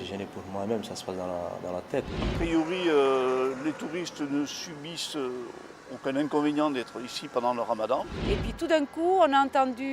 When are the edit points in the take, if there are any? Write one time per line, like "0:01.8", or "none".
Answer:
0:02.3
0:08.2